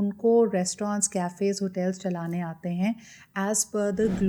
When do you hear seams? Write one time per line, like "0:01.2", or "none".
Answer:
none